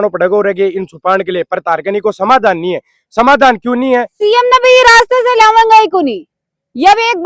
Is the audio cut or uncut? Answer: uncut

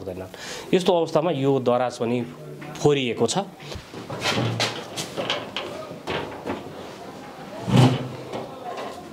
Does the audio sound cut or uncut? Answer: cut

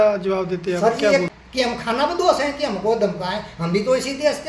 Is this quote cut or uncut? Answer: cut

